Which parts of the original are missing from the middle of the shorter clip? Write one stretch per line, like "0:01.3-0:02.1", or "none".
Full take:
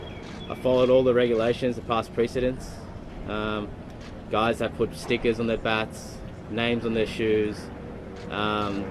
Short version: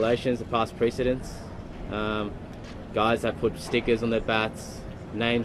none

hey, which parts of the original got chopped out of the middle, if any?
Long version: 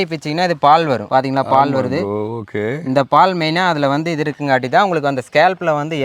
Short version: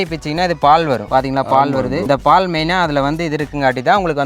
0:02.0-0:02.9

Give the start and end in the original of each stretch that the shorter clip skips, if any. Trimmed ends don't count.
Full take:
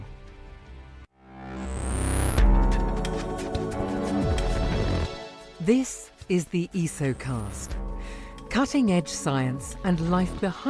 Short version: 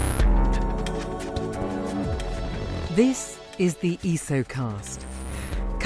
0:05.0-0:05.5

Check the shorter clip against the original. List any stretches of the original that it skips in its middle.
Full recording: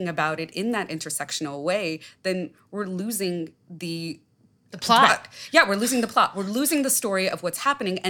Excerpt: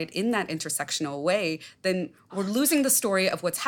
0:02.7-0:06.3

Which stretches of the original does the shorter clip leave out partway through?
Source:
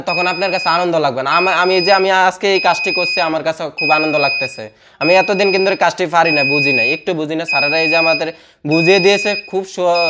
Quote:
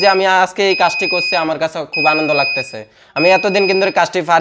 none

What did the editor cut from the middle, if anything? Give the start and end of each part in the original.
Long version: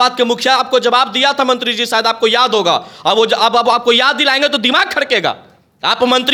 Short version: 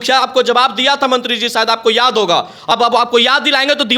0:03.1-0:03.5

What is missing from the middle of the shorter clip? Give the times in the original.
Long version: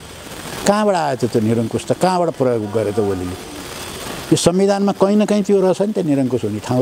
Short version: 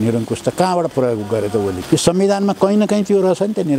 0:03.2-0:04.2

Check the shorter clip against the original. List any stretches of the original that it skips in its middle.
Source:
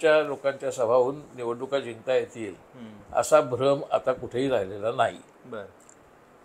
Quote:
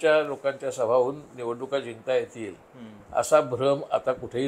none

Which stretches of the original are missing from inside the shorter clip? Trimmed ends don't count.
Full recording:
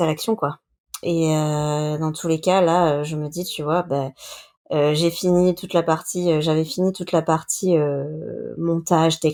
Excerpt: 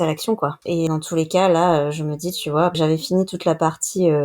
0:00.8-0:02.0
0:03.9-0:06.4

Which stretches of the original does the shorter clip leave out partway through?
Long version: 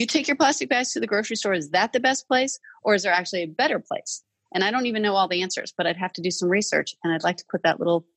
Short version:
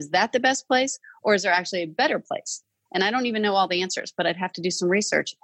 none

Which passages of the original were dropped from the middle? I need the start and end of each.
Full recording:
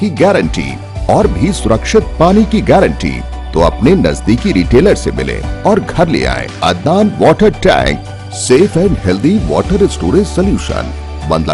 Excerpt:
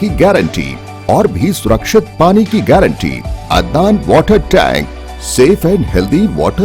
0:03.3-0:06.4

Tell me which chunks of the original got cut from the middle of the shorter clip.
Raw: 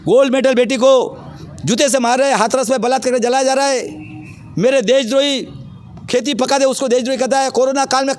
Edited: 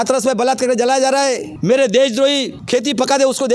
0:03.9-0:04.4
0:05.5-0:05.9

